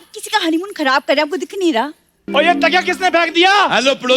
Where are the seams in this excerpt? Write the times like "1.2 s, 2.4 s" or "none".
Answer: 2.2 s